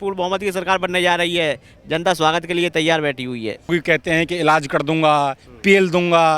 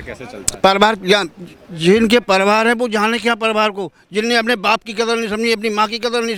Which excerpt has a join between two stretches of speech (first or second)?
first